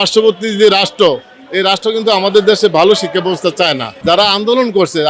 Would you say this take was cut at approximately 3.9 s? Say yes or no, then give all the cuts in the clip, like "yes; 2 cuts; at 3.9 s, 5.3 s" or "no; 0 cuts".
yes; 1 cut; at 3.9 s